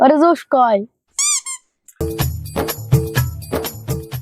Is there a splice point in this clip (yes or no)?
yes